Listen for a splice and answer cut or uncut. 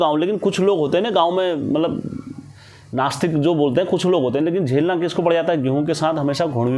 uncut